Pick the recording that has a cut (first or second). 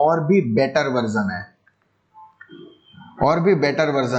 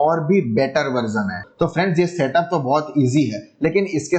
second